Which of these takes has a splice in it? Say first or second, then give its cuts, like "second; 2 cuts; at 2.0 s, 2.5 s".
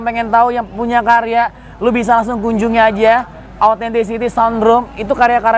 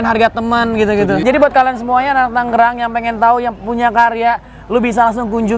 second; 1 cut; at 1.2 s